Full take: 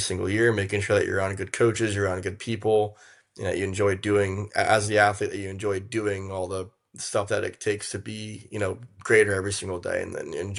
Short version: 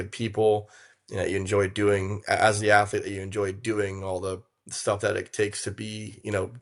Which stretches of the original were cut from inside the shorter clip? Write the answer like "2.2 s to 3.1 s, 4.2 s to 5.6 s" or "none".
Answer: none